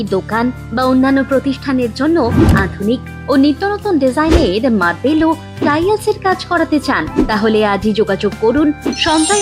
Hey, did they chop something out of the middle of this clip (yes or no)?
no